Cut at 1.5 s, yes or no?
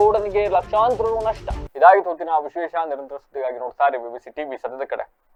no